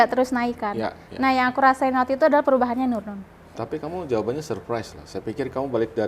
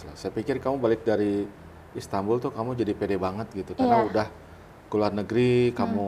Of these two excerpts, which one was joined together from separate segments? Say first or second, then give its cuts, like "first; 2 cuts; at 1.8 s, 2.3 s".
first; 1 cut; at 3.6 s